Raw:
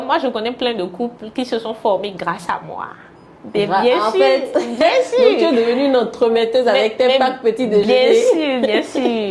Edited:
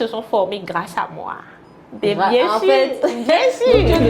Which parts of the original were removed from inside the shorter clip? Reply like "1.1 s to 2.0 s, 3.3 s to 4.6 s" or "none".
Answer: none